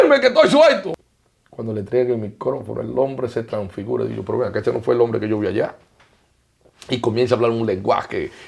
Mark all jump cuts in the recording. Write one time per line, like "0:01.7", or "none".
0:00.9